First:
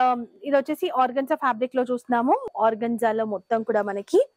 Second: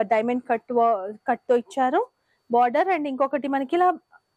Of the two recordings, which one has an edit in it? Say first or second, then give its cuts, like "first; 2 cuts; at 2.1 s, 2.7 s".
first; 1 cut; at 2.5 s